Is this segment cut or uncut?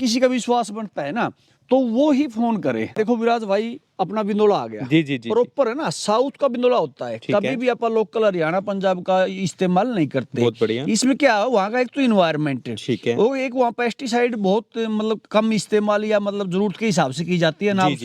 cut